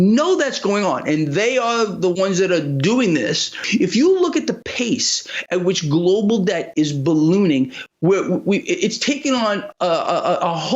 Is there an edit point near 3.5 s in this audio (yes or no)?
yes